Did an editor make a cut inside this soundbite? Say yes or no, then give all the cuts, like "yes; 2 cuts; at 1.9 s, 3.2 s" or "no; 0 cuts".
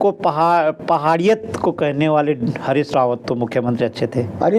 no; 0 cuts